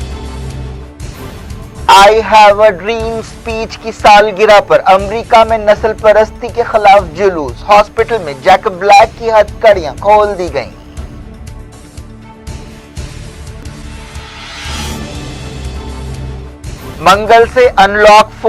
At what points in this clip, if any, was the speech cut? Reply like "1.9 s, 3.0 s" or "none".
1.2 s